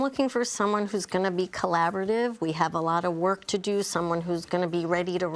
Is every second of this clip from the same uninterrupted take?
yes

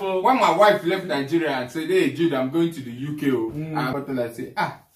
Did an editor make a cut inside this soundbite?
yes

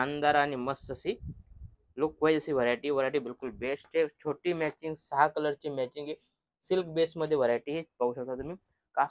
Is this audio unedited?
yes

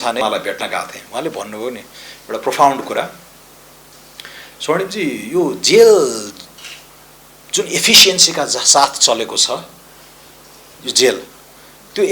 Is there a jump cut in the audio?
no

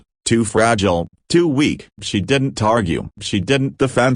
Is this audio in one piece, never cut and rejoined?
yes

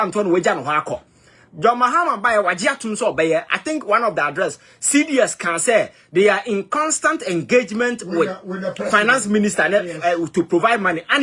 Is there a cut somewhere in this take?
no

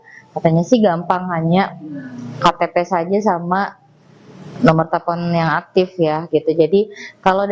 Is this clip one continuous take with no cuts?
yes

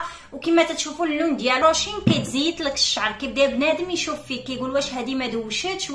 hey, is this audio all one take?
no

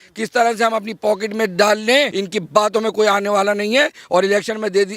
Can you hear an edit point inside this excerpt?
yes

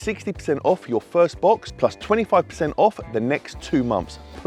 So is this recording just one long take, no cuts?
yes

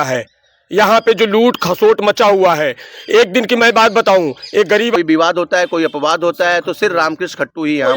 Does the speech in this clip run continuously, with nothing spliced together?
no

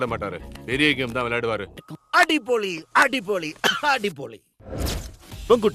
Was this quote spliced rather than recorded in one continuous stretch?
yes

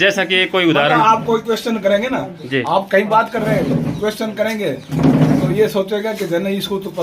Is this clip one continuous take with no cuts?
yes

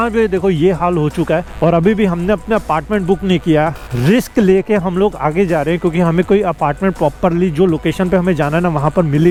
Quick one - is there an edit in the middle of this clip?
no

